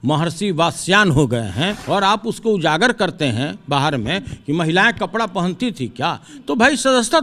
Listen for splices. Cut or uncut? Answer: cut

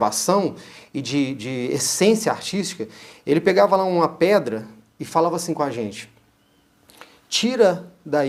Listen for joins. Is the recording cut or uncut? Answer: uncut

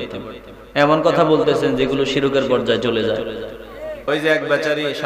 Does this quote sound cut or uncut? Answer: cut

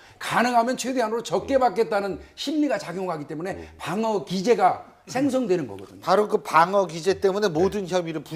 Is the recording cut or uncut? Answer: cut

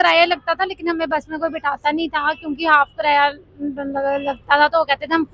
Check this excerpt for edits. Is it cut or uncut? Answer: uncut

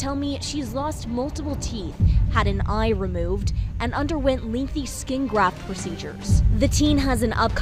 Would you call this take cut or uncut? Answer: uncut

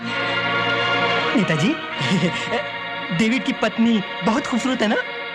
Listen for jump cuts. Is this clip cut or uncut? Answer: cut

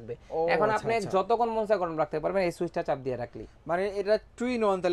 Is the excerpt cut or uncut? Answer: uncut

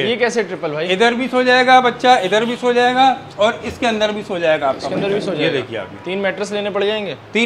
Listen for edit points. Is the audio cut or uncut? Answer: uncut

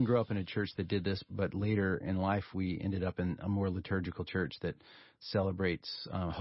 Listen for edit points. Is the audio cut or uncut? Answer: cut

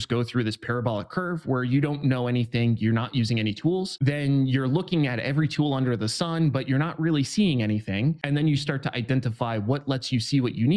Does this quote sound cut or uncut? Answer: cut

